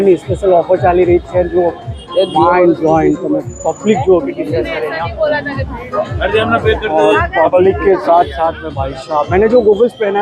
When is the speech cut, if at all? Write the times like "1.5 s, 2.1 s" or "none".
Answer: none